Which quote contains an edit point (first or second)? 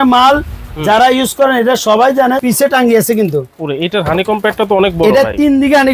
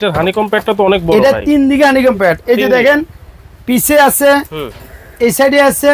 first